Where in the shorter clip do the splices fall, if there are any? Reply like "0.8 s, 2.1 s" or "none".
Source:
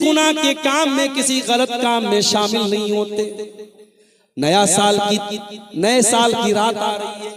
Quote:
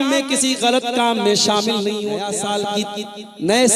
2.6 s